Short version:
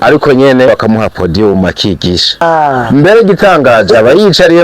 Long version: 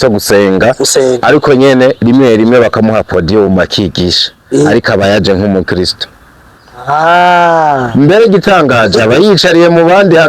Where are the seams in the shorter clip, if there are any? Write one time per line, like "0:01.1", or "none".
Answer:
0:00.7
0:02.4